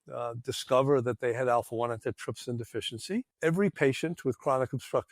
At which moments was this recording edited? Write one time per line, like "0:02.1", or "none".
0:03.3